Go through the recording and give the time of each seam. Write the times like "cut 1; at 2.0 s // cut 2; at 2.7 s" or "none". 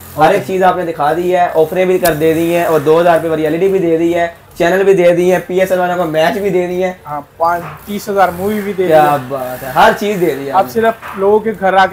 none